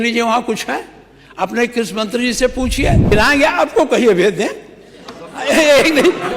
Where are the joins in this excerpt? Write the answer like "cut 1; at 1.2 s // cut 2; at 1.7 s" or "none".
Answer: cut 1; at 3.1 s